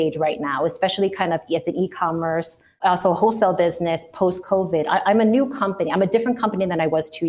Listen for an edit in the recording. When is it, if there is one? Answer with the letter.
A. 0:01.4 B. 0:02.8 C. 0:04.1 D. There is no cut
B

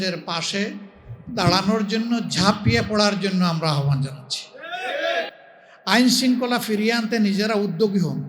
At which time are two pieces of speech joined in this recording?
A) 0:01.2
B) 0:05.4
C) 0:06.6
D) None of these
B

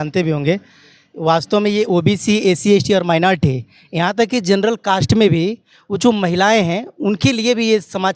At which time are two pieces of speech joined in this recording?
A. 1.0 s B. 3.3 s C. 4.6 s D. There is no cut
D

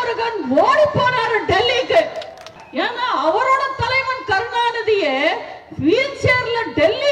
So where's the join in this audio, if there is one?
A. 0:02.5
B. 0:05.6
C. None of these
A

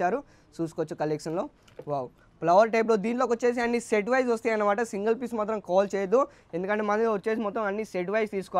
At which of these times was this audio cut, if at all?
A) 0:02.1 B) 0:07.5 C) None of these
C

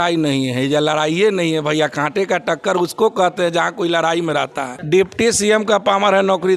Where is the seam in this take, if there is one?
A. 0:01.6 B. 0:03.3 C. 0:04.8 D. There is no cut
C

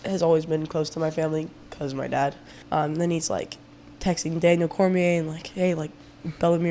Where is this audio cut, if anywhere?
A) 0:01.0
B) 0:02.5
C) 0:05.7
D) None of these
B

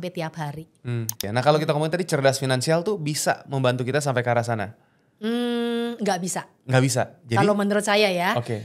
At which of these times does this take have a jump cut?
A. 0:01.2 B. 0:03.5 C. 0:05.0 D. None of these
A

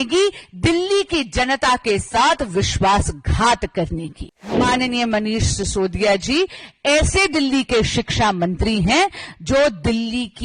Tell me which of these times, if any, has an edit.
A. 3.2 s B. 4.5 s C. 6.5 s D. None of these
B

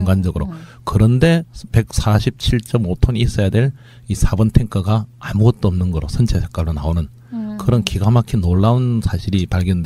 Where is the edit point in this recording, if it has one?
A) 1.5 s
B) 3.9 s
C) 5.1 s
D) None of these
C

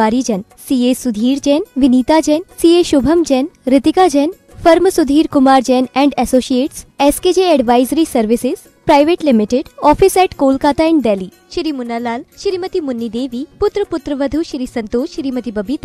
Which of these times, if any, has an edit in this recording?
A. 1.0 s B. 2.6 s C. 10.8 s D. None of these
D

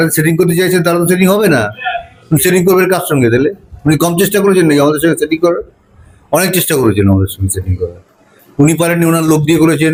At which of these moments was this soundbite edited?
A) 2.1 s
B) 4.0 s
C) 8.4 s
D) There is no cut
D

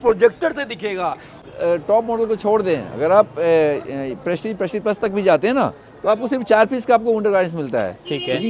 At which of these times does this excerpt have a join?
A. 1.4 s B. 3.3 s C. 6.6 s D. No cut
A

